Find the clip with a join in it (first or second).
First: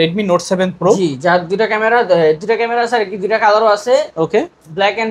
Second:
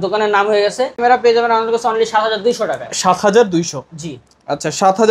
second